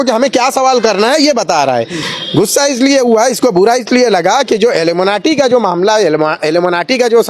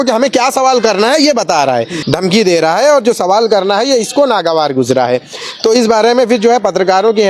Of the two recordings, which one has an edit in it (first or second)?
second